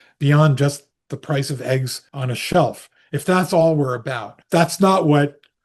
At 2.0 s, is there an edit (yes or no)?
yes